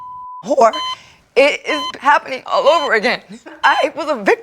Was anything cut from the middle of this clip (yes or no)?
yes